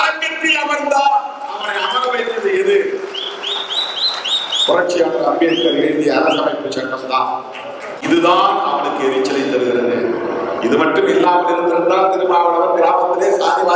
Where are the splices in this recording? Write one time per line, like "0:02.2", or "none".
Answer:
0:07.9